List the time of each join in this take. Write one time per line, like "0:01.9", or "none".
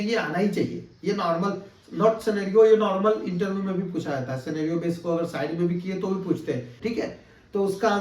0:06.8